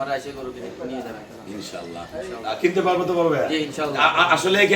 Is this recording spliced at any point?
no; 0 cuts

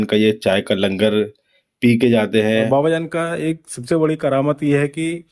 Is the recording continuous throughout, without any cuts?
no; 1 cut; at 2.7 s

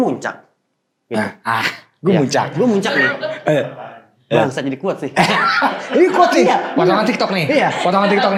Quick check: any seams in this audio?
no; 0 cuts

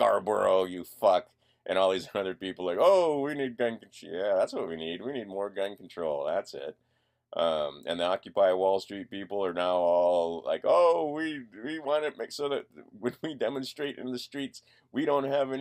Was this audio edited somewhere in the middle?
yes; 1 cut; at 14.0 s

